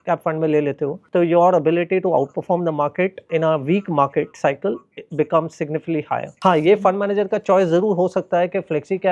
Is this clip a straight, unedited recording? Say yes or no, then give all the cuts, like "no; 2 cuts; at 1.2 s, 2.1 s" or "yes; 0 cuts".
no; 1 cut; at 6.4 s